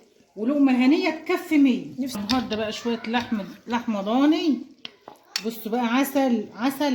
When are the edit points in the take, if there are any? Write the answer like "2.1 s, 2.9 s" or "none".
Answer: 2.2 s